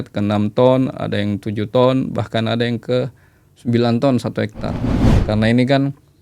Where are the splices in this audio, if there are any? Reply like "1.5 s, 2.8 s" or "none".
5.1 s